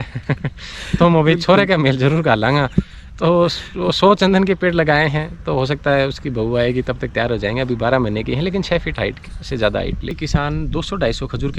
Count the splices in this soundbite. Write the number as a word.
one